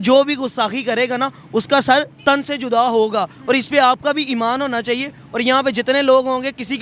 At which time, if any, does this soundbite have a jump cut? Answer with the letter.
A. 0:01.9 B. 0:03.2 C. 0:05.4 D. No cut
D